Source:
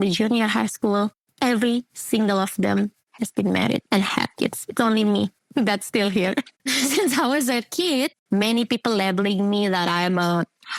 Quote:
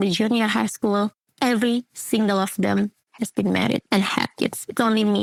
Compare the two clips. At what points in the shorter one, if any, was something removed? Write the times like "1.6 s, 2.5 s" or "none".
none

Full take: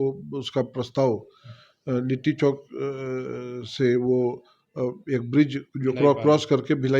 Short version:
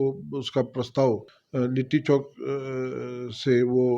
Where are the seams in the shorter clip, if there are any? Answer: 1.4 s

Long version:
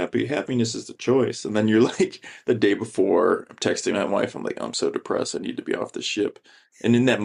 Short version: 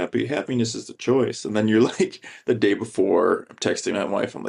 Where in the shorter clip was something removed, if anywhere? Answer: none

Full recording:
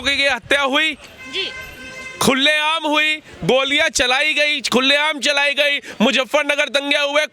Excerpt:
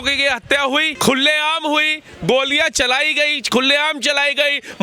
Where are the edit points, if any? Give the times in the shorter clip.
0.9 s

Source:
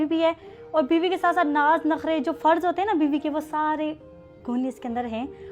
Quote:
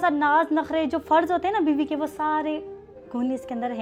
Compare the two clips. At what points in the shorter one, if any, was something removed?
none

